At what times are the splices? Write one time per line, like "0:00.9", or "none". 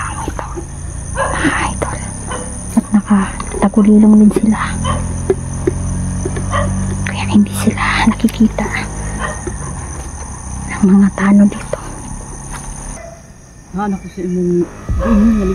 0:13.0